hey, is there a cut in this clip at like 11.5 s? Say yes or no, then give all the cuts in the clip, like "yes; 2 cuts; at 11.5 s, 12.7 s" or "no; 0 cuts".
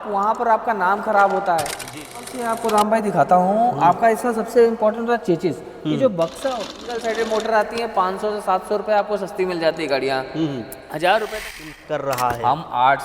yes; 3 cuts; at 2.3 s, 6.8 s, 11.5 s